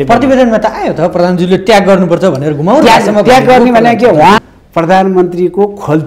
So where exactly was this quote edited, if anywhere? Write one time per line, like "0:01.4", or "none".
0:04.4